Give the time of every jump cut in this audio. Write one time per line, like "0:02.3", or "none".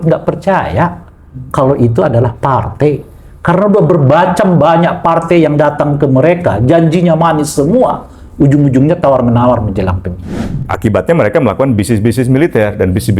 0:10.6